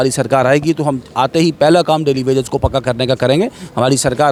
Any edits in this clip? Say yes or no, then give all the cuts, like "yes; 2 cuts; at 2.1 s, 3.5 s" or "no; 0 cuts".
no; 0 cuts